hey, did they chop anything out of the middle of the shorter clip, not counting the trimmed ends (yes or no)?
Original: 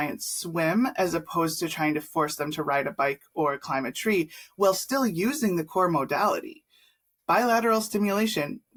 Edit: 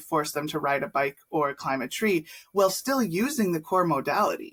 no